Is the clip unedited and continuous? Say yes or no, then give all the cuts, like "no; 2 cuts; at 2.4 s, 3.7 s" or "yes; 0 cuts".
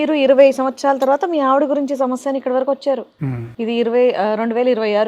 yes; 0 cuts